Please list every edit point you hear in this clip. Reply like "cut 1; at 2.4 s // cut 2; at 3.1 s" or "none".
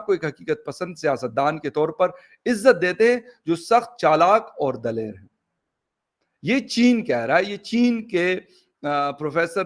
none